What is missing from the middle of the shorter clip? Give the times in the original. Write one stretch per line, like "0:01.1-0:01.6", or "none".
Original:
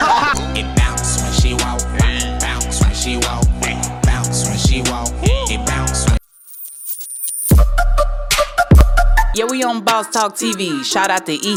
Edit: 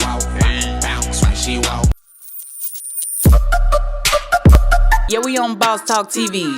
0:03.5-0:06.2